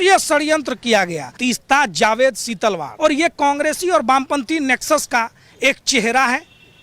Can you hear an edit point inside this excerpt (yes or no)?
yes